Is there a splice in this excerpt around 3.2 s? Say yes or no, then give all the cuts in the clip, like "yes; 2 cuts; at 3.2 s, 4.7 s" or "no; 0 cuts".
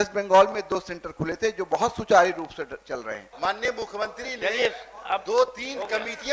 yes; 1 cut; at 3.2 s